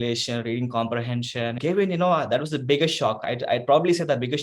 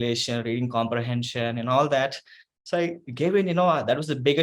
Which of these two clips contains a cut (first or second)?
first